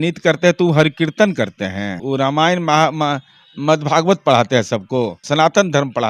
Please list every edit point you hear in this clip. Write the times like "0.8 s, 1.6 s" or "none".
2.0 s, 5.2 s